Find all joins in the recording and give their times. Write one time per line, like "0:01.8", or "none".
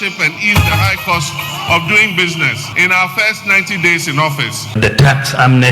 0:02.7
0:04.8